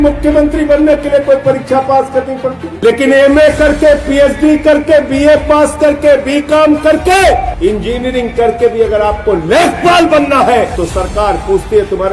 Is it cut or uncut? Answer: cut